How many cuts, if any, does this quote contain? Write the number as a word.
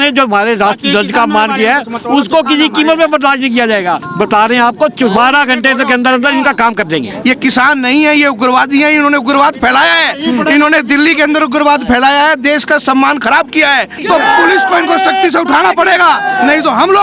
three